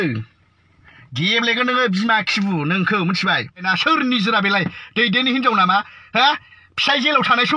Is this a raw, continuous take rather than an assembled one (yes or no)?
no